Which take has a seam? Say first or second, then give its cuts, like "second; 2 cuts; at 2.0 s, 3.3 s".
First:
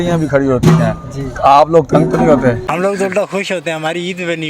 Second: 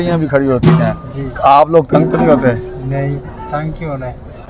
first; 1 cut; at 2.7 s